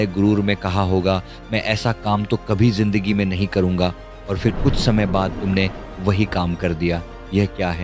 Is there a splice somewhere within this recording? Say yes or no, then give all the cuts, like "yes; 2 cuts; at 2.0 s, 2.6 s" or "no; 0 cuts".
no; 0 cuts